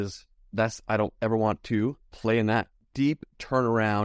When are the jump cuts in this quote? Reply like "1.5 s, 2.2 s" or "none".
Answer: 2.8 s